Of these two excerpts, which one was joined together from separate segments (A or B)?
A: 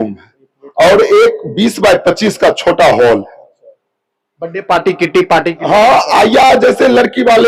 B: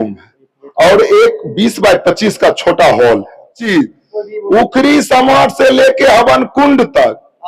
B